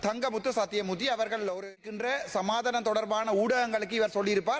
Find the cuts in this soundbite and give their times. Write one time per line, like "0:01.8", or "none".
0:01.9